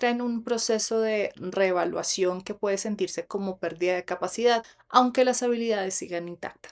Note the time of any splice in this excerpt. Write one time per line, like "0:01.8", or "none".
0:04.8